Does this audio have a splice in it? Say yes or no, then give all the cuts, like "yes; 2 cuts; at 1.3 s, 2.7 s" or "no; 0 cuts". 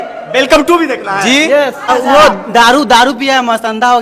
yes; 1 cut; at 1.8 s